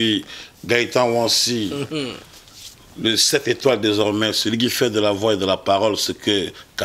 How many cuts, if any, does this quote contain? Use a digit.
0